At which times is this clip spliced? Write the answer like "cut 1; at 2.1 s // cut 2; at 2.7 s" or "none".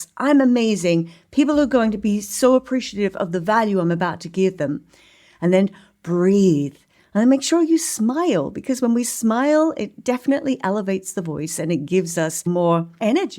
cut 1; at 12.5 s